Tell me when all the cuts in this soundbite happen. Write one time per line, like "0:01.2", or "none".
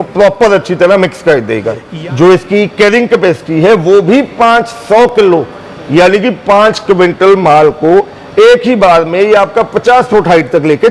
0:01.9